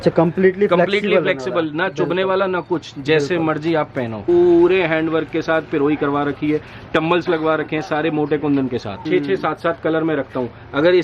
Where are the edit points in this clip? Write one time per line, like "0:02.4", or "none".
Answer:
0:04.3
0:09.0